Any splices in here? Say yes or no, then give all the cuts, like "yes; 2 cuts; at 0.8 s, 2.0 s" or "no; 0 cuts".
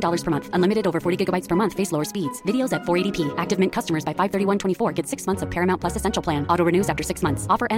no; 0 cuts